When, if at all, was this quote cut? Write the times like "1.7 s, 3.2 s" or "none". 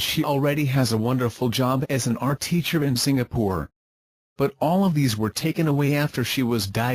1.8 s, 5.7 s